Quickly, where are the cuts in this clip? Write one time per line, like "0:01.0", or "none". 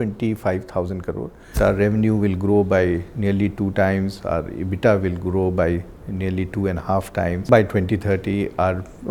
0:01.6
0:07.5